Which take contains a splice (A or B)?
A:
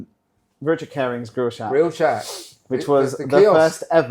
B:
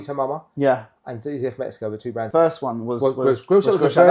B